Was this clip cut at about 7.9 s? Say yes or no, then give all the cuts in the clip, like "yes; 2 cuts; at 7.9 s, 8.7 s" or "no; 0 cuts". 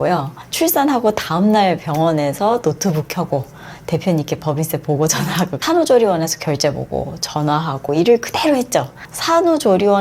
yes; 2 cuts; at 5.6 s, 7.9 s